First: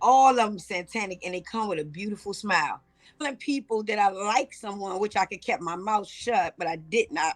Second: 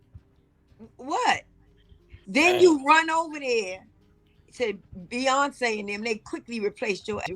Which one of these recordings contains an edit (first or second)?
first